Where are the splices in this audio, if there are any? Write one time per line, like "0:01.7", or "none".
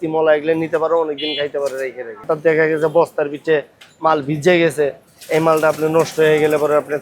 0:02.2